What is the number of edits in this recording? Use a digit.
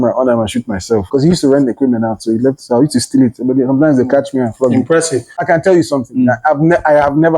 2